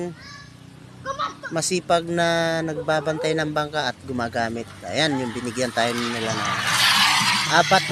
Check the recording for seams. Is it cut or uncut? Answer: uncut